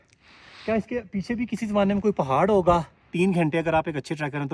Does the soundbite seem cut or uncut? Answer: cut